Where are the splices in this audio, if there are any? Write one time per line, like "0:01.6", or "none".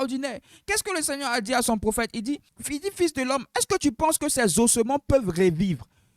0:02.5

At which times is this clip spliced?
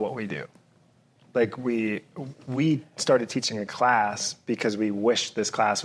none

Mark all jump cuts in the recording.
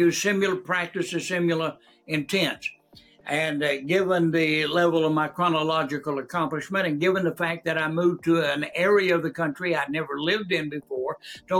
none

